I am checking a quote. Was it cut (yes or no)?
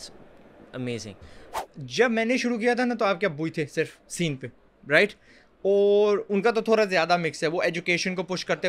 yes